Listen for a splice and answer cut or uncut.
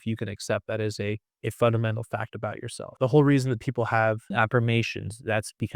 cut